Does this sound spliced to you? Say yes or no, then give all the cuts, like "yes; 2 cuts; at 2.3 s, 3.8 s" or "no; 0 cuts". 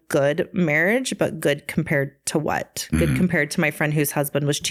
no; 0 cuts